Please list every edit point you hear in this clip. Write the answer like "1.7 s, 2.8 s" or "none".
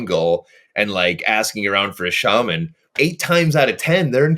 2.8 s